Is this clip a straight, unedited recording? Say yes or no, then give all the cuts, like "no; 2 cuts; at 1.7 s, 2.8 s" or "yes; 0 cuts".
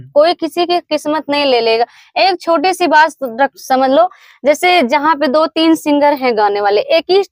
yes; 0 cuts